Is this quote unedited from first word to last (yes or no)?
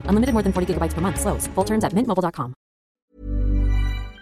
no